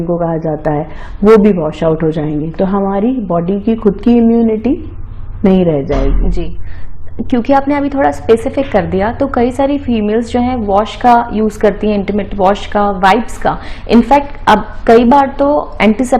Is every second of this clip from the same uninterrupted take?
yes; 0 cuts

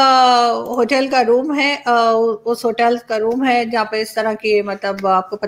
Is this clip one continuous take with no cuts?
yes; 0 cuts

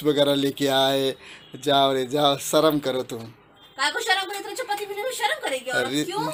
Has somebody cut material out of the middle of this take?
no; 0 cuts

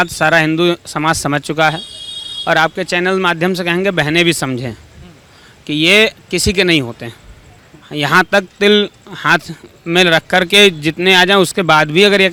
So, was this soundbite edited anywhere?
no; 0 cuts

